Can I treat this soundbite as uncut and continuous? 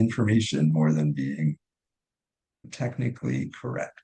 no; 1 cut; at 2.7 s

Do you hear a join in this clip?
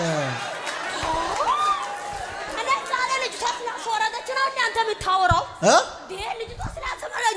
no; 0 cuts

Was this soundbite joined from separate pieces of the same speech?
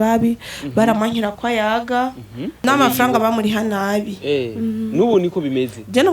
yes; 1 cut; at 2.6 s

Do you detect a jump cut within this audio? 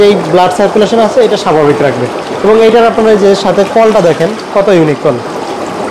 no; 0 cuts

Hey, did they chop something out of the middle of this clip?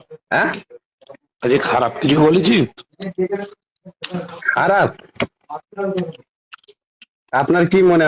no; 0 cuts

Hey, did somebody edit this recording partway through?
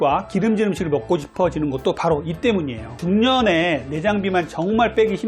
yes; 1 cut; at 3.0 s

